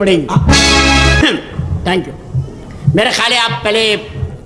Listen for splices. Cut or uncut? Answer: cut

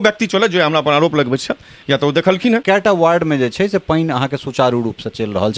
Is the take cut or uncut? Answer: cut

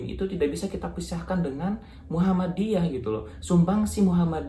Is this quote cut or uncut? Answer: uncut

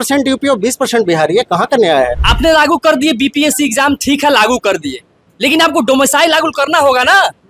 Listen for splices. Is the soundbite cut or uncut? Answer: cut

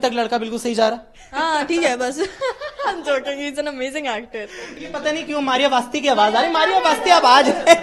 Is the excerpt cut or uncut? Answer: cut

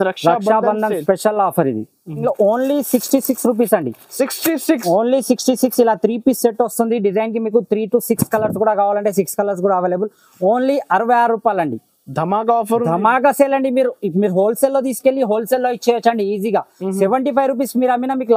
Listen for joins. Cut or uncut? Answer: cut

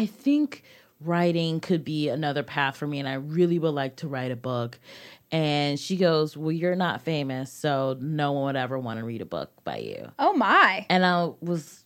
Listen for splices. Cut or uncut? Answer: uncut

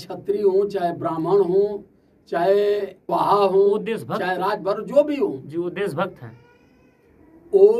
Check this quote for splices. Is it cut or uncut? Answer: cut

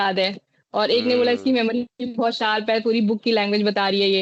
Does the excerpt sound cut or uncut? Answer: uncut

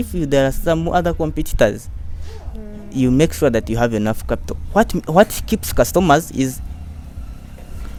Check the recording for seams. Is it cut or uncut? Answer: uncut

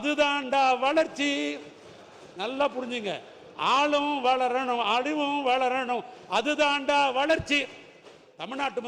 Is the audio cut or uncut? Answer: uncut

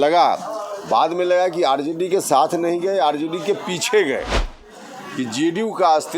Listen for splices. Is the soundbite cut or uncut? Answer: cut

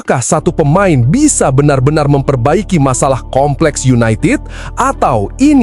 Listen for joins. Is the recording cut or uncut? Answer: uncut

